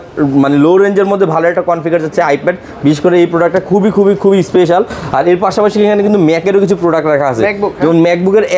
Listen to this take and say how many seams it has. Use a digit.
0